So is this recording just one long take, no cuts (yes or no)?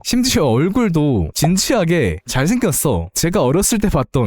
no